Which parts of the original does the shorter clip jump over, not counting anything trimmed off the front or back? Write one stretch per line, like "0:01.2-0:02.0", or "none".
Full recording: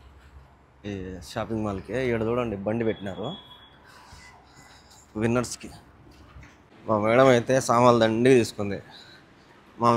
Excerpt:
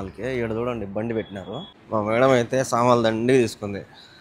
0:03.4-0:06.7